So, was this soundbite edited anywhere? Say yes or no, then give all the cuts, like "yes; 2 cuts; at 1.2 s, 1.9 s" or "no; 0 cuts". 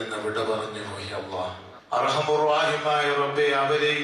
yes; 1 cut; at 1.7 s